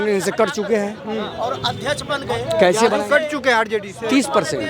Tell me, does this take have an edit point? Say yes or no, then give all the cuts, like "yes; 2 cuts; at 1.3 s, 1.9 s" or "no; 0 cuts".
no; 0 cuts